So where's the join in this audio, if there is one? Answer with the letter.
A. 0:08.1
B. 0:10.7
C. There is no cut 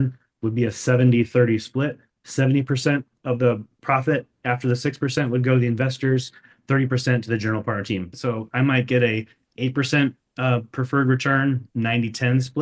A